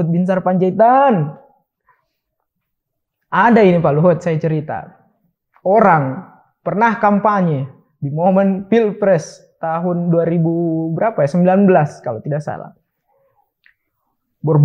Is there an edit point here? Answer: no; 0 cuts

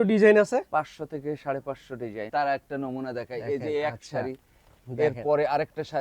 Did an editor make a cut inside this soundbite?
yes; 1 cut; at 2.3 s

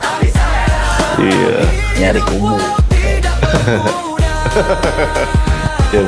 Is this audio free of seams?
yes; 0 cuts

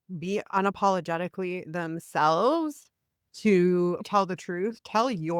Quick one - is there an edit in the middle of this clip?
yes; 1 cut; at 4.0 s

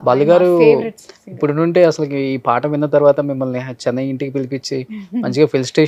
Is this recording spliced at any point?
no; 0 cuts

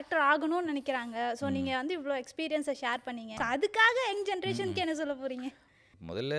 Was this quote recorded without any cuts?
no; 1 cut; at 3.3 s

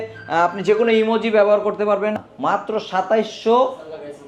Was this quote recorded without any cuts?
no; 1 cut; at 2.3 s

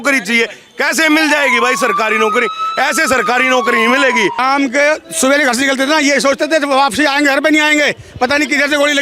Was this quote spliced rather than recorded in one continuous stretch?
yes; 1 cut; at 4.4 s

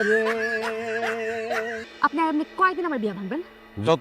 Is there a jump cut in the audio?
yes; 1 cut; at 1.8 s

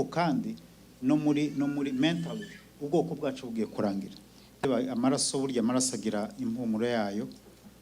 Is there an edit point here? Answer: yes; 1 cut; at 4.7 s

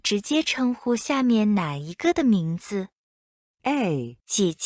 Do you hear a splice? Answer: no; 0 cuts

